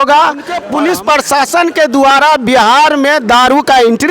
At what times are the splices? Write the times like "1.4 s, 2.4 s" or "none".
1.0 s